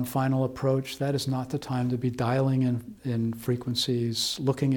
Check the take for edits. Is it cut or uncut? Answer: uncut